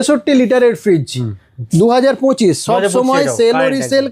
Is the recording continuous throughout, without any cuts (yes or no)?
yes